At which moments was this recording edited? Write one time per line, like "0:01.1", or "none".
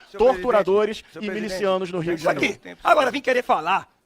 0:02.2